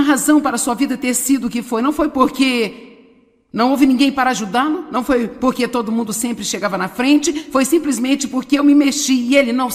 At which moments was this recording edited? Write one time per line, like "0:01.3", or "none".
none